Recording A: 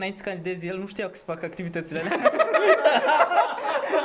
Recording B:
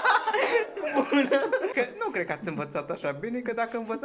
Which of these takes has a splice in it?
B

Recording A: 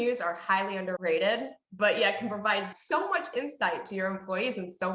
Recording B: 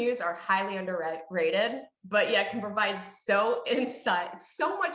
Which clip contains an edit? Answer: A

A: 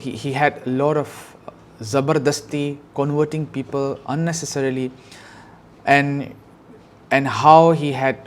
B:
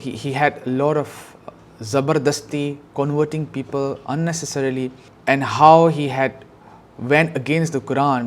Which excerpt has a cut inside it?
B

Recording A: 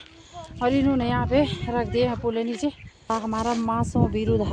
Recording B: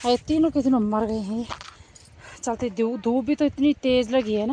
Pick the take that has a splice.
A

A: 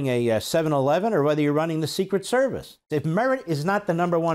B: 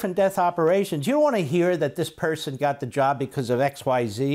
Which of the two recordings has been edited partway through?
A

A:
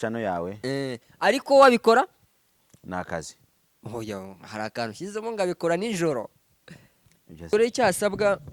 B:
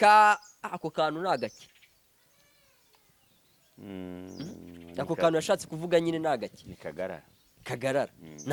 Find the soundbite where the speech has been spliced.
A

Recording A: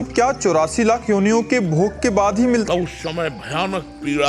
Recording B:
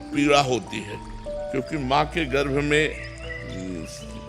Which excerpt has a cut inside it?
A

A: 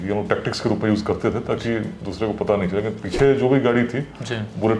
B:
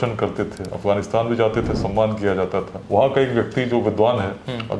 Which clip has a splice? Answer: B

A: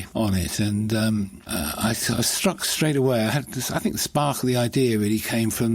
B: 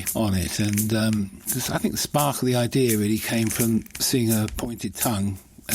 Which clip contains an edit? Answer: B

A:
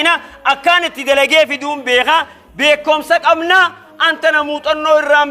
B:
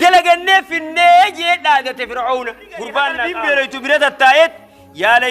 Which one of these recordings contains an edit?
B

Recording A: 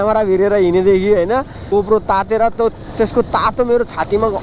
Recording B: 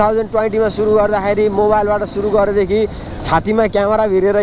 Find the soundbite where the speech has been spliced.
A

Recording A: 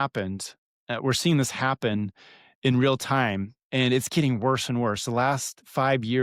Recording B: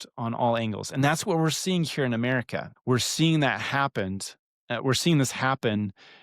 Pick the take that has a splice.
B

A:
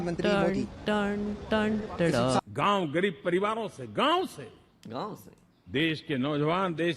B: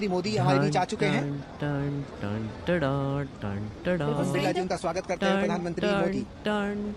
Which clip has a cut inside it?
A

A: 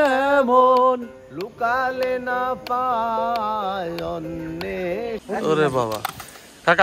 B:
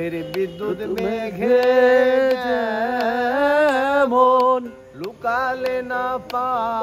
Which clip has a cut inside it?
A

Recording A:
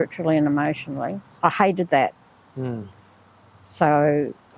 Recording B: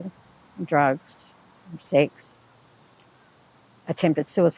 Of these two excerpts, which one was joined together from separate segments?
A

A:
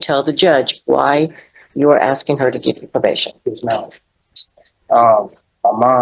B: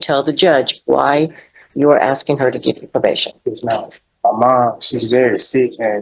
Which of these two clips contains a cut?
B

